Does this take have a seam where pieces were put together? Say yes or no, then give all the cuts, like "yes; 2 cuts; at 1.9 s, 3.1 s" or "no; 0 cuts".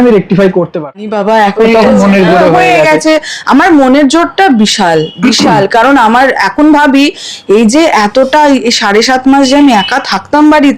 yes; 1 cut; at 1.0 s